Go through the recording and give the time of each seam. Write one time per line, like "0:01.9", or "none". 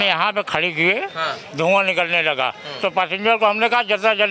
none